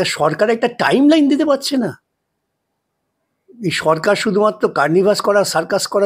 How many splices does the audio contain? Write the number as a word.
zero